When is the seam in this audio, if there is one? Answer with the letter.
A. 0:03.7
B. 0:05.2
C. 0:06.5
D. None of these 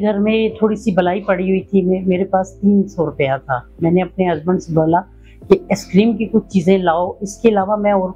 D